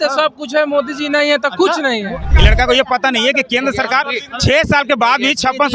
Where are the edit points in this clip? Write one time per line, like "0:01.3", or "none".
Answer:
0:02.3